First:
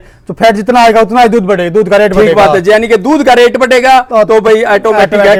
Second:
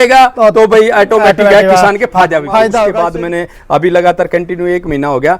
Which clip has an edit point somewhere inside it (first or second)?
second